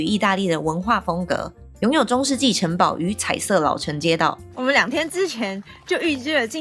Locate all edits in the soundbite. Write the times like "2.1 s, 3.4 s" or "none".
4.5 s